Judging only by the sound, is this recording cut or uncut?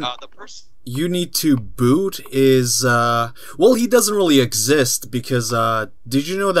uncut